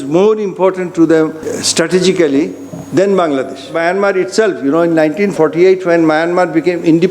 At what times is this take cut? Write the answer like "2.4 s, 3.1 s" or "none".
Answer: 1.5 s, 3.7 s, 5.3 s

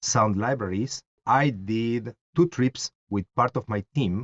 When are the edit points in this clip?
1.2 s, 2.2 s

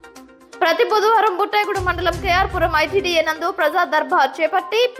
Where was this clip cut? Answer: none

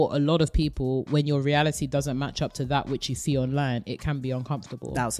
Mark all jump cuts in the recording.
none

